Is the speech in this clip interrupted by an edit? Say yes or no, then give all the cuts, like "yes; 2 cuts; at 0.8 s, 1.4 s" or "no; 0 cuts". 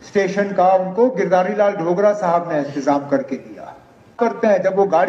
yes; 1 cut; at 4.1 s